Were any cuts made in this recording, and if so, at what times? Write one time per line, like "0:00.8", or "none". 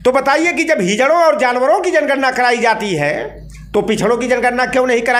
none